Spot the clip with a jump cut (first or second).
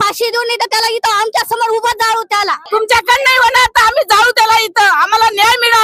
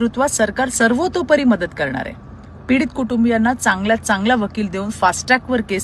first